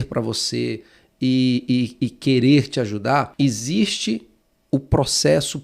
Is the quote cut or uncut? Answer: cut